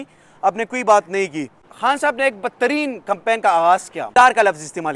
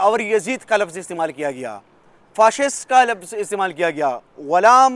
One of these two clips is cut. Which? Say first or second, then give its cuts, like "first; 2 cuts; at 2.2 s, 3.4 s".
first; 2 cuts; at 1.6 s, 4.1 s